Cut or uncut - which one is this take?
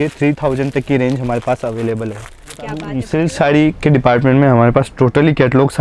cut